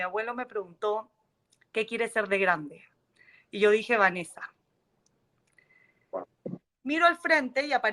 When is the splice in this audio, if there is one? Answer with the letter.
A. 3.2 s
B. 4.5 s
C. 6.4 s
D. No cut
C